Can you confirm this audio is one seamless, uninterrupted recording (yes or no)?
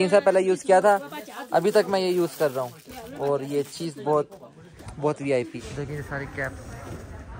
no